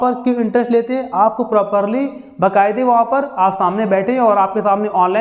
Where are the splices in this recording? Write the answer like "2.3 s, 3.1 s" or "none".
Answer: none